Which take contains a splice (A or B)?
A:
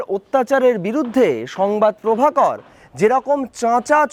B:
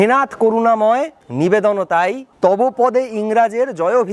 B